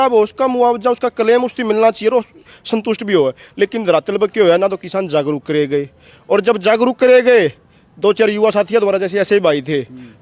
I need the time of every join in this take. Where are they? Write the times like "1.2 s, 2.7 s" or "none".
none